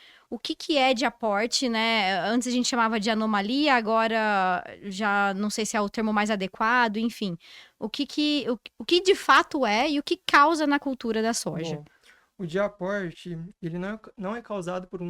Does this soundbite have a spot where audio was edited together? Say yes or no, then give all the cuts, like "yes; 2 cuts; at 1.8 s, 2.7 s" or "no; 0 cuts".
no; 0 cuts